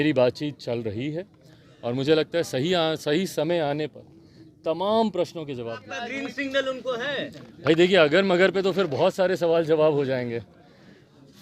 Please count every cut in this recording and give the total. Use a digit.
1